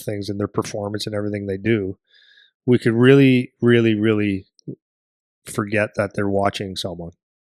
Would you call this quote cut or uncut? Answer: uncut